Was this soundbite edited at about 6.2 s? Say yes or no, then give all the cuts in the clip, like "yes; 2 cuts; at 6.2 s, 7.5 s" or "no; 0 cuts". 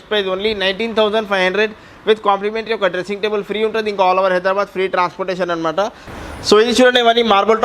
yes; 1 cut; at 6.2 s